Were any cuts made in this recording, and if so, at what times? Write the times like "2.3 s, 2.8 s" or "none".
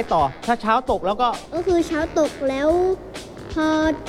1.5 s